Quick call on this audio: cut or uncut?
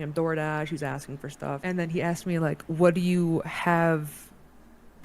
cut